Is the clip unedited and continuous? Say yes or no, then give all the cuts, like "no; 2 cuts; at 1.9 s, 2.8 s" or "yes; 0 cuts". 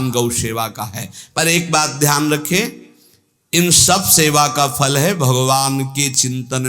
yes; 0 cuts